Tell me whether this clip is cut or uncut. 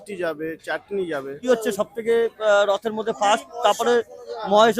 cut